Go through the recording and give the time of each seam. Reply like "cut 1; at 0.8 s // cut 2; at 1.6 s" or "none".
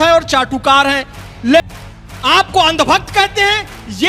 cut 1; at 1.6 s